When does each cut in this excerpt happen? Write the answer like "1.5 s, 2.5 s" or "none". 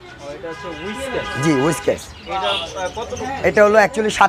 none